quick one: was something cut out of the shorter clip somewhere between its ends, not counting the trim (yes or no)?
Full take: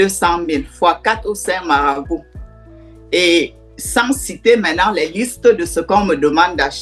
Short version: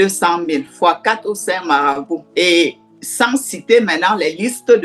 yes